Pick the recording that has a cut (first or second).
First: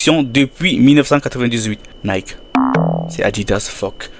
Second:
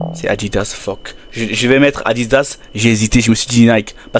first